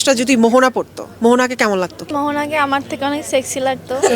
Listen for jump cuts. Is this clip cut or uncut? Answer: cut